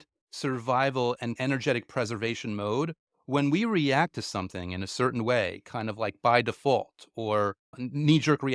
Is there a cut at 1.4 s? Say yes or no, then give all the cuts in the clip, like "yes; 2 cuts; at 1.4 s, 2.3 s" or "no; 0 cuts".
yes; 1 cut; at 1.4 s